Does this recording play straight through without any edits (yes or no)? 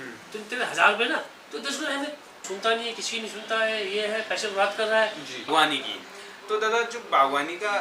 no